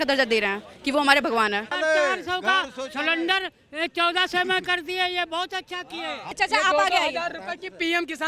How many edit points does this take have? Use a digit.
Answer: 2